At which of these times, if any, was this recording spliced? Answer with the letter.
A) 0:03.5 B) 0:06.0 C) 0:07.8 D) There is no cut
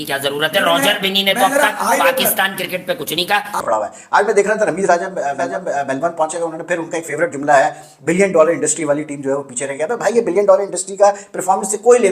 A